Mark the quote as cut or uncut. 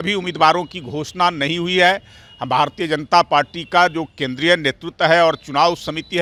uncut